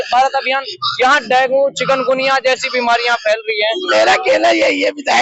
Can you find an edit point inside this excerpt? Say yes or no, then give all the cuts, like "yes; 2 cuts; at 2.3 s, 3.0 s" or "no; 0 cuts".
yes; 1 cut; at 3.9 s